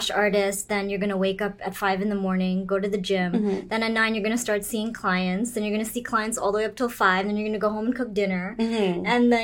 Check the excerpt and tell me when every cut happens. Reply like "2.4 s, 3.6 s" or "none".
none